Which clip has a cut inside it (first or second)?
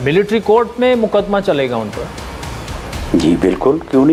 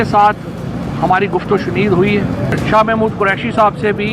second